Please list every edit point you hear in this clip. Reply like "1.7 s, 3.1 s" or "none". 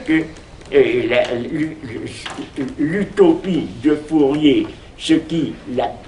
none